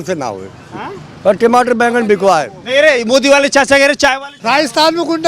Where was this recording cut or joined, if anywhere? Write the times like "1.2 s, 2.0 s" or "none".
4.3 s